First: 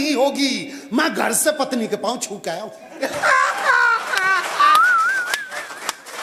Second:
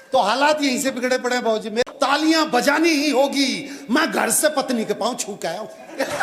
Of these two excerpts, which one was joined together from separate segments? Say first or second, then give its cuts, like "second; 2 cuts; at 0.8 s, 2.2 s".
second; 1 cut; at 1.9 s